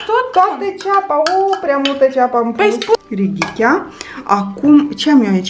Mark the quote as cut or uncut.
cut